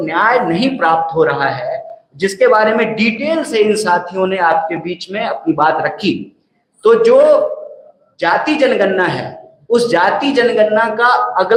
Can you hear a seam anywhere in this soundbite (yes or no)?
no